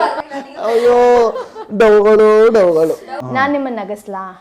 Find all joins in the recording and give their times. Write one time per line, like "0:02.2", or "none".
0:03.2